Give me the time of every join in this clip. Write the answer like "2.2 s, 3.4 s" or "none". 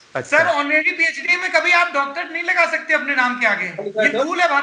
none